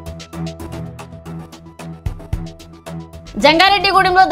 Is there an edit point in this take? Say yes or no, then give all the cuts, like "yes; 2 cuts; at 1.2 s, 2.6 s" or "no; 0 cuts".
yes; 2 cuts; at 0.8 s, 2.9 s